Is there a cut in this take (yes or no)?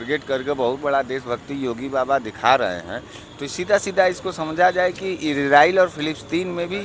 no